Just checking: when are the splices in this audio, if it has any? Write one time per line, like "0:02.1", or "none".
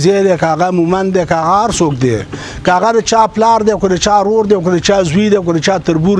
none